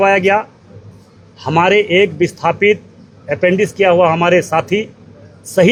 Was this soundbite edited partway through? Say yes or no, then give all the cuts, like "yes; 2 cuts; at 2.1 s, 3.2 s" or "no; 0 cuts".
no; 0 cuts